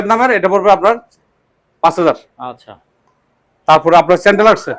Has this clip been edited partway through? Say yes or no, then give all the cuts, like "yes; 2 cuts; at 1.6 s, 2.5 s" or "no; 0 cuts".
no; 0 cuts